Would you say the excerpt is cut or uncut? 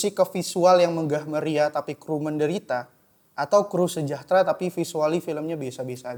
uncut